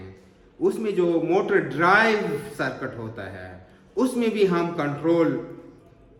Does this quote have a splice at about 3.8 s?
no; 0 cuts

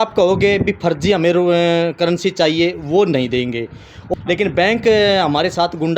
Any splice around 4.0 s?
yes; 1 cut; at 4.0 s

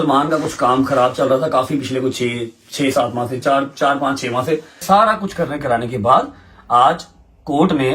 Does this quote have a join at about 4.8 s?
yes; 1 cut; at 4.8 s

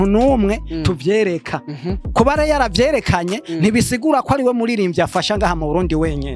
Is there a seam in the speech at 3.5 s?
no; 0 cuts

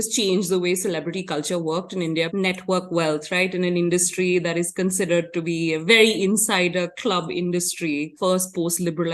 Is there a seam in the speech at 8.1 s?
yes; 2 cuts; at 2.3 s, 8.1 s

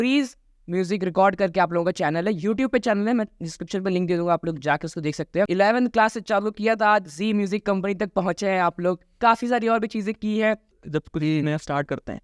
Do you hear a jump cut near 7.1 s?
no; 2 cuts; at 5.5 s, 10.6 s

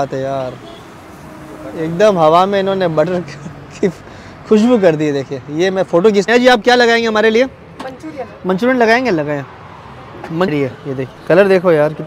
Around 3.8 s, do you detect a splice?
no; 2 cuts; at 6.2 s, 10.5 s

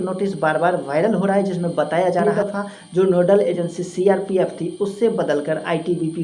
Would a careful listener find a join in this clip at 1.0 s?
no; 1 cut; at 2.2 s

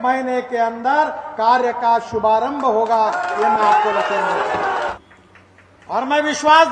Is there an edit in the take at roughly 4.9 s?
yes; 1 cut; at 4.9 s

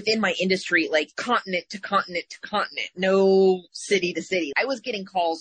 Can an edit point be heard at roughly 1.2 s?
no; 1 cut; at 4.5 s

